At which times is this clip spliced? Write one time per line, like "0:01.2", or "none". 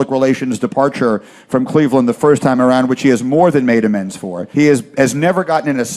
0:04.5

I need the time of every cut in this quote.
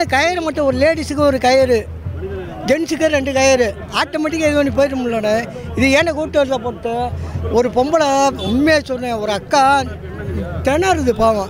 none

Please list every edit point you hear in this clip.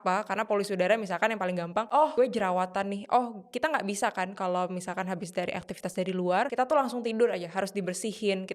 0:02.0
0:06.5

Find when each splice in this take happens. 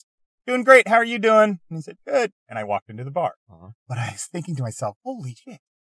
none

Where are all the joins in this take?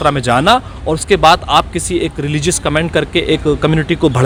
none

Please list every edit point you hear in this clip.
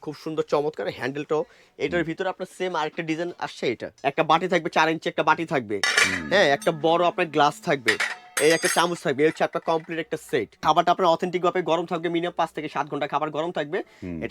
0:03.9
0:10.6

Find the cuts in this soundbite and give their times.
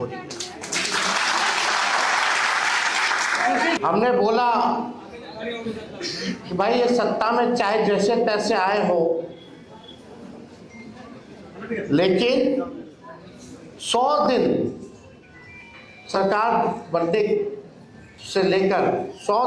0:03.8

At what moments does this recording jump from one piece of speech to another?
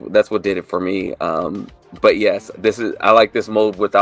none

